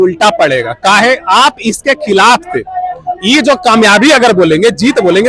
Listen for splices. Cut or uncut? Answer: uncut